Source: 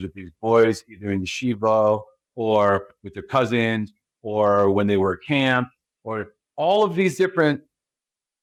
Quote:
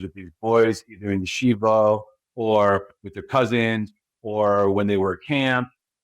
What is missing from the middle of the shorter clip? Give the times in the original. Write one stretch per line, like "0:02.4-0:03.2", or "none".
none